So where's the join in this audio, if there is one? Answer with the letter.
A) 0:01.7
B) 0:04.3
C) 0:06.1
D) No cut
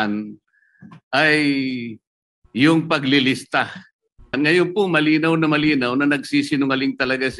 B